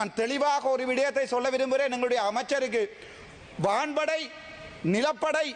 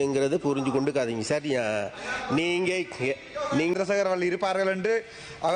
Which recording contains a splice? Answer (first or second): second